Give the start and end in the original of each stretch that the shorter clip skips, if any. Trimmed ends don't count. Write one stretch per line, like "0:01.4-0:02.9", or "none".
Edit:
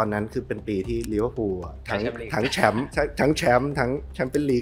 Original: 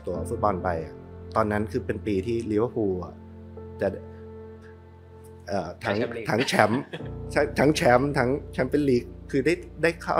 0:03.2-0:05.7
0:06.8-0:07.3